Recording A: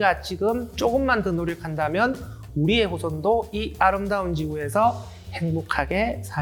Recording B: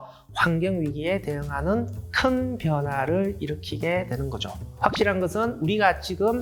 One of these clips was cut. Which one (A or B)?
B